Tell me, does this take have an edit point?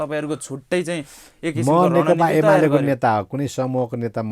no; 0 cuts

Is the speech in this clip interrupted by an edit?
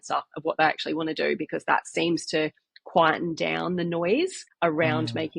yes; 1 cut; at 4.4 s

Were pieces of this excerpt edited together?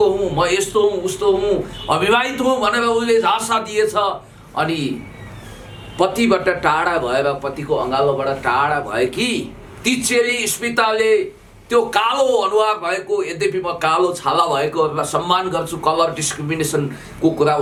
no; 0 cuts

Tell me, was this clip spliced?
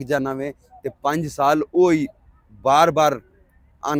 no; 0 cuts

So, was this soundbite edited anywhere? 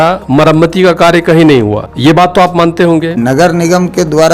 yes; 2 cuts; at 1.9 s, 3.2 s

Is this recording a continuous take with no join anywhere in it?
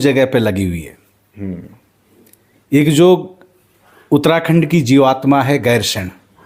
yes; 0 cuts

